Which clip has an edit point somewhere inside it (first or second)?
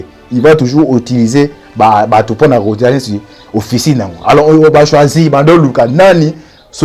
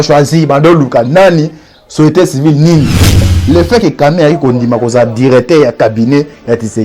second